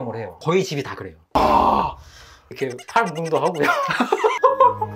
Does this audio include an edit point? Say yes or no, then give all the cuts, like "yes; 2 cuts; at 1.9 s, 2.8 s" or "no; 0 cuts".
yes; 1 cut; at 1.3 s